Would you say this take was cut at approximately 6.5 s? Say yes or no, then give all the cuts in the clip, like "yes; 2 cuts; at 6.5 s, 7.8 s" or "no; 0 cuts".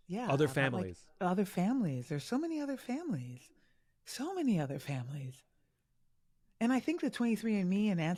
no; 0 cuts